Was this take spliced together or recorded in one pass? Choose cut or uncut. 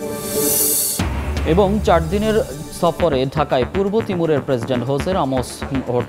uncut